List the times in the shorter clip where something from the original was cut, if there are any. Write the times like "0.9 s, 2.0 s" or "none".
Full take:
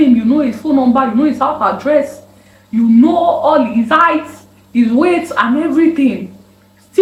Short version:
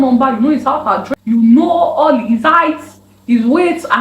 1.0 s